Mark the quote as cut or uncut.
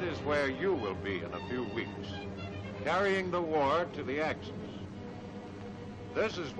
uncut